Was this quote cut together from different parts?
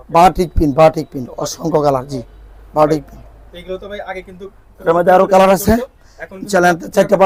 no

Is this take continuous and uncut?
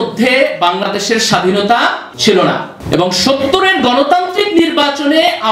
no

